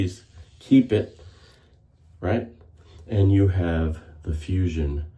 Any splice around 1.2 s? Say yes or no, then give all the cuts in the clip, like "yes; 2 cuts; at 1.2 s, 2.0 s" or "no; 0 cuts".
no; 0 cuts